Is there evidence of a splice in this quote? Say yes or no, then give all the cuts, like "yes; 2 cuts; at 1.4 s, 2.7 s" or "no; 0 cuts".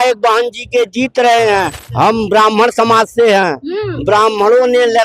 yes; 1 cut; at 1.8 s